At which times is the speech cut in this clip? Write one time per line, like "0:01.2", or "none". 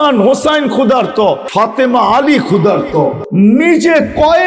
0:01.4
0:03.2